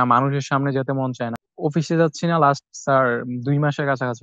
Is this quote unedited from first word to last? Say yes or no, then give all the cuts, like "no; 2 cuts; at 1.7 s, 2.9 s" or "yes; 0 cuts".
no; 1 cut; at 1.4 s